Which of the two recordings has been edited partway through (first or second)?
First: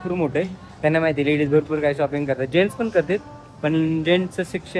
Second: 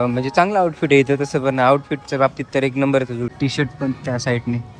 second